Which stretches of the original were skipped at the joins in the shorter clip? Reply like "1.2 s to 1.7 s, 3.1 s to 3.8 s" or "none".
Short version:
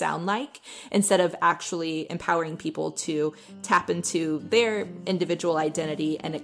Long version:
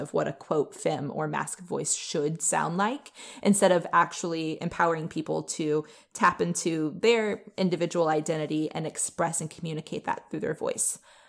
none